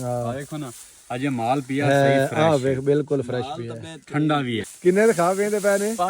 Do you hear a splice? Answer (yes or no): yes